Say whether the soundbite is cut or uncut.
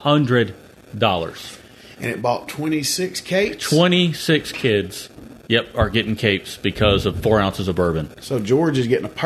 uncut